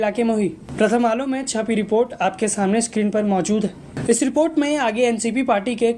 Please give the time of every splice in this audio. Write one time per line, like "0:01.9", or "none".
none